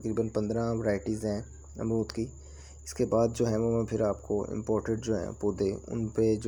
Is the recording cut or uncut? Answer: uncut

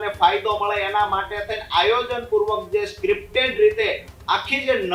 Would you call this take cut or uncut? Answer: uncut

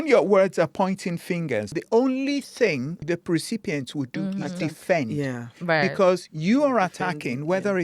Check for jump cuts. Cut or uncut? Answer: cut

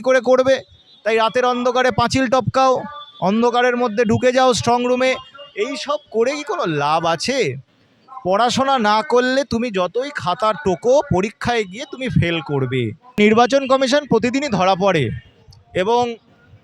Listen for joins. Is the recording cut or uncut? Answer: cut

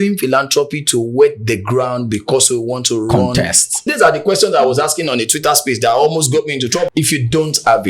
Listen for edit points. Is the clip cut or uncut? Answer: cut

